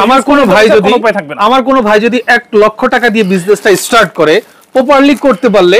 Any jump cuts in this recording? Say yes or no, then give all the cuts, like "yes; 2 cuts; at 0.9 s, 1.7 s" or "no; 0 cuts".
no; 0 cuts